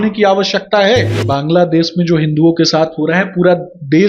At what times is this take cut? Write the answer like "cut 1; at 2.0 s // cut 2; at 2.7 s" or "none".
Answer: cut 1; at 1.2 s